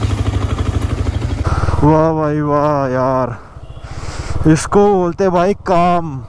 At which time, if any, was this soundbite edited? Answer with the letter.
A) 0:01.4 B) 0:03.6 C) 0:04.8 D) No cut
A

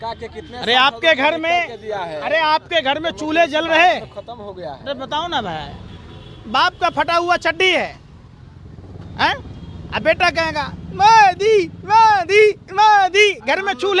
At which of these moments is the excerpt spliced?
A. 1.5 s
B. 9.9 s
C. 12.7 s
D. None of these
D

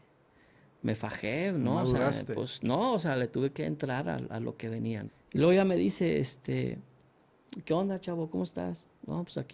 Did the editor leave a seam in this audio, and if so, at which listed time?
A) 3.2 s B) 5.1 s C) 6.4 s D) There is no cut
B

